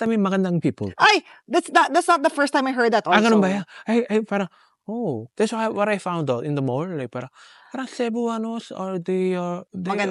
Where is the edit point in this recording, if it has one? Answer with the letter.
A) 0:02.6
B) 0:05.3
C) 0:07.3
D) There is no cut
D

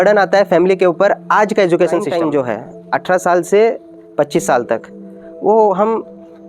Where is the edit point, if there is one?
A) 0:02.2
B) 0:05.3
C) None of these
A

